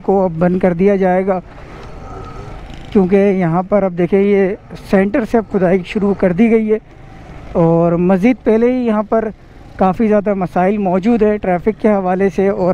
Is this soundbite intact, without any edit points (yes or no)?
yes